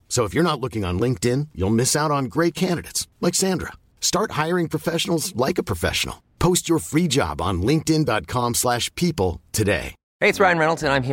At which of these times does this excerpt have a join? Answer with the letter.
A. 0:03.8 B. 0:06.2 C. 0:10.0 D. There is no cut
C